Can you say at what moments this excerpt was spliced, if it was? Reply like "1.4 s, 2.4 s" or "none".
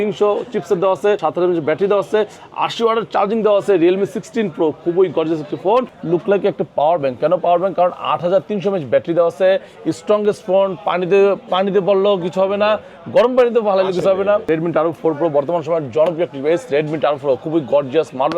1.3 s, 6.0 s, 14.4 s